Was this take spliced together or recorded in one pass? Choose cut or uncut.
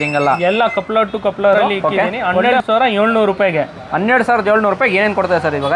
cut